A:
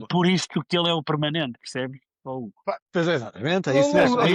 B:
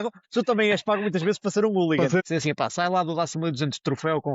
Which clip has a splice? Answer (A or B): B